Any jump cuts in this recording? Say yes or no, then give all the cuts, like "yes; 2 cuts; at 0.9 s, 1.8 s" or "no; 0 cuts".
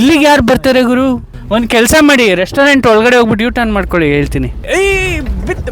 yes; 2 cuts; at 1.3 s, 4.7 s